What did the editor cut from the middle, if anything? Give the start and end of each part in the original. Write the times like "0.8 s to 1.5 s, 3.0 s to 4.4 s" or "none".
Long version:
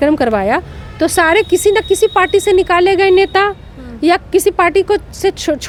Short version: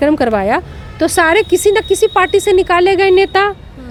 none